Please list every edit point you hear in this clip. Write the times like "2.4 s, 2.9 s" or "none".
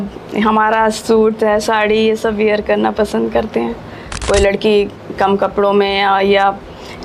4.1 s